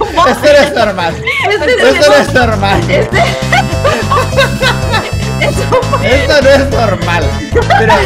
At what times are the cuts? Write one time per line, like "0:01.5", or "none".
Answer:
none